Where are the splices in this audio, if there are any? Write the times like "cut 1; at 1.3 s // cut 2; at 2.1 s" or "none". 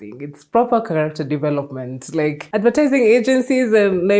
cut 1; at 2.4 s